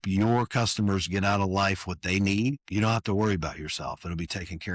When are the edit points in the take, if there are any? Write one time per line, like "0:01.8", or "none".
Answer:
none